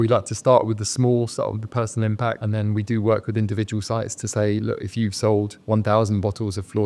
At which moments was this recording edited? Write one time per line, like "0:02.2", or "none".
none